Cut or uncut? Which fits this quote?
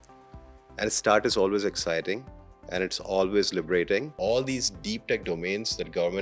cut